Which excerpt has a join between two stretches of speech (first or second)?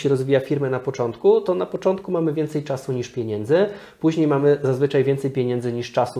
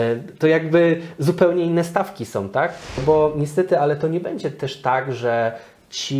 second